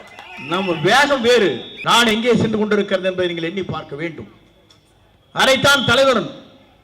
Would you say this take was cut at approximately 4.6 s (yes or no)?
no